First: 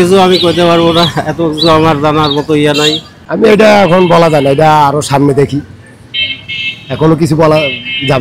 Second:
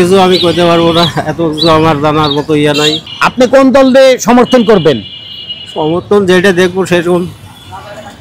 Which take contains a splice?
first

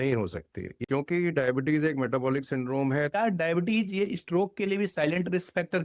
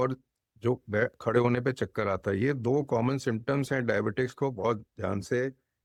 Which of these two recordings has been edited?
first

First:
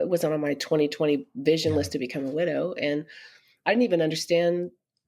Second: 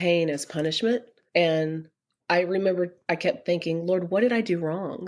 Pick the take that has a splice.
second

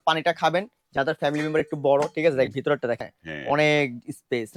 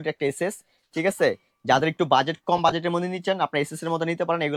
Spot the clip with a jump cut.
first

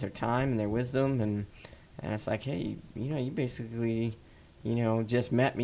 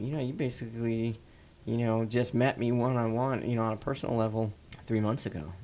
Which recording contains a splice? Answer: second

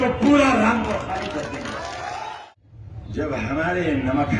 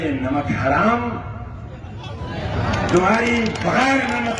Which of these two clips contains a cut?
first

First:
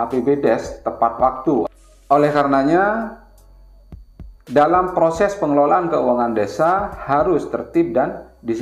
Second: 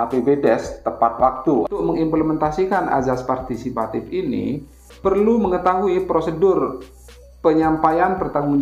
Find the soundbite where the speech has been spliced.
second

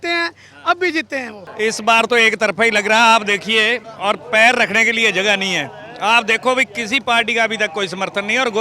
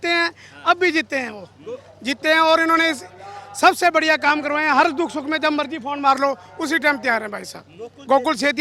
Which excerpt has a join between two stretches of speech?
first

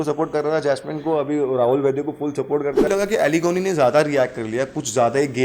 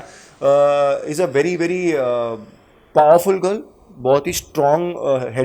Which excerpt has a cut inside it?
first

